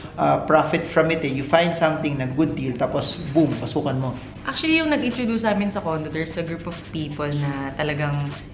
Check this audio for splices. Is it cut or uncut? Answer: uncut